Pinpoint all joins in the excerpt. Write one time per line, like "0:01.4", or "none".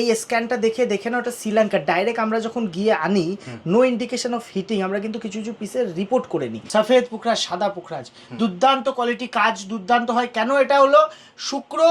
0:06.6